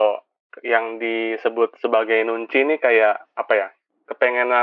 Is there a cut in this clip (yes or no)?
no